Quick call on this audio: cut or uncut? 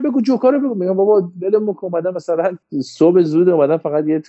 uncut